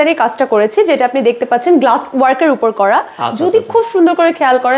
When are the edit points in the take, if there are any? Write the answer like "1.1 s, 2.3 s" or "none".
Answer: none